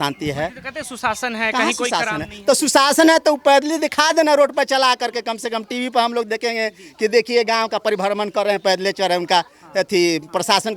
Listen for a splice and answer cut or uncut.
uncut